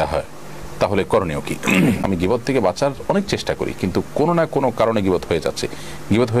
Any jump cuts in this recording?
yes; 1 cut; at 2.0 s

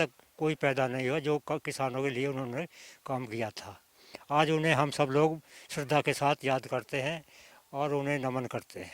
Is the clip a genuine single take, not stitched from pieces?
yes; 0 cuts

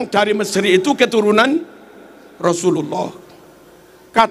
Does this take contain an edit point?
no; 0 cuts

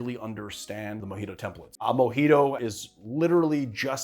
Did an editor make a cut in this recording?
yes; 2 cuts; at 1.6 s, 2.6 s

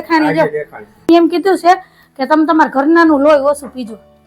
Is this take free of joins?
no; 1 cut; at 1.1 s

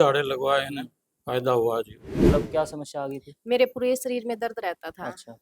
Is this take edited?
yes; 1 cut; at 2.1 s

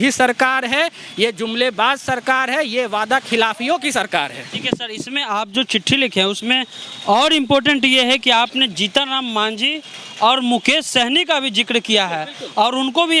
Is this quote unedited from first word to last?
yes; 0 cuts

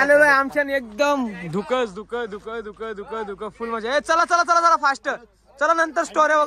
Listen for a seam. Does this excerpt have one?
no; 0 cuts

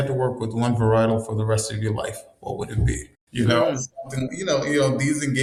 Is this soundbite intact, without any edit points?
yes; 0 cuts

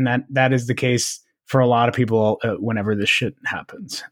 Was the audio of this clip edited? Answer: no; 0 cuts

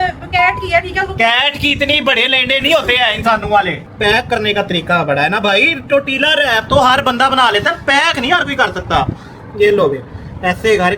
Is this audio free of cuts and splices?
no; 1 cut; at 3.8 s

